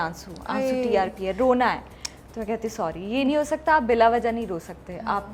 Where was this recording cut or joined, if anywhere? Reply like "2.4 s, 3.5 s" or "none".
none